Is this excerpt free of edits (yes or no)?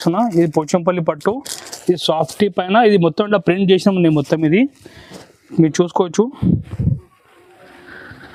yes